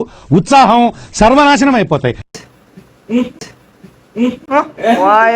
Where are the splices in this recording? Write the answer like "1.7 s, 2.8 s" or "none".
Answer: 2.3 s

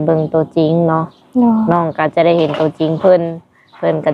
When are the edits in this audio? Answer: none

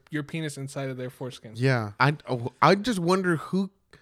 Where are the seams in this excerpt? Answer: 1.9 s

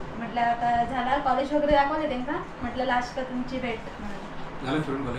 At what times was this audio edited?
none

